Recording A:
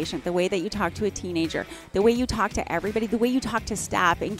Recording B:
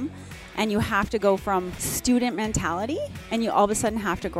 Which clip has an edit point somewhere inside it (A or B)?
B